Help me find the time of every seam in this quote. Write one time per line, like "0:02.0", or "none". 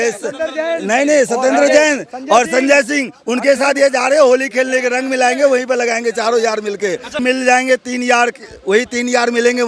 0:07.2